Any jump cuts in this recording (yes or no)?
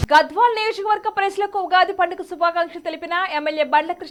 no